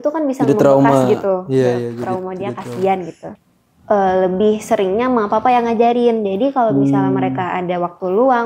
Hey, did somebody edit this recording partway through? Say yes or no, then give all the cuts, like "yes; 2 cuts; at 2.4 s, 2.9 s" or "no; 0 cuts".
yes; 1 cut; at 3.2 s